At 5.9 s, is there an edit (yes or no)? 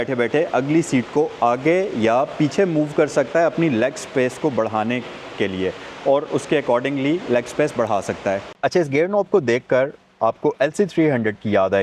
no